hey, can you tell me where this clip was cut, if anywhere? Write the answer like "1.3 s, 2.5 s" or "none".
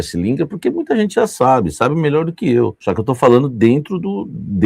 2.8 s